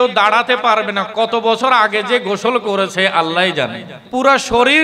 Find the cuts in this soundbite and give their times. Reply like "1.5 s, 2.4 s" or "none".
3.9 s